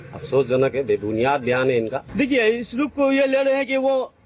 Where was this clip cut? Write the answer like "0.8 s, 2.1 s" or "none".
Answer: 2.0 s